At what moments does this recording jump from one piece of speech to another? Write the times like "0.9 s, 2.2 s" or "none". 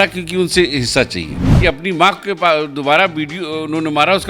1.4 s